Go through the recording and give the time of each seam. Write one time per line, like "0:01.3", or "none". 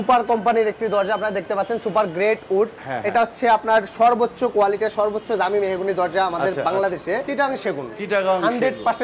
0:07.3